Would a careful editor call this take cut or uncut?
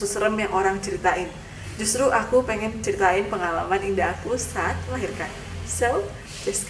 uncut